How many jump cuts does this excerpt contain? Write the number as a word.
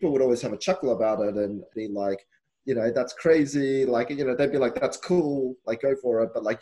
one